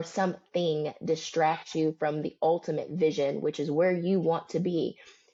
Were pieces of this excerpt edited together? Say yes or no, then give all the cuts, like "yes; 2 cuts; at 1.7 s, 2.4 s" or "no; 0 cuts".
no; 0 cuts